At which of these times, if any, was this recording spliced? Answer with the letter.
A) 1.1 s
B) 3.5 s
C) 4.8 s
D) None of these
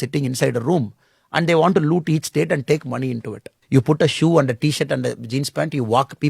B